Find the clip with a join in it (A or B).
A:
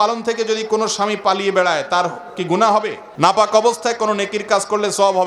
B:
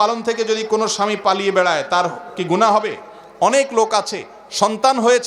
A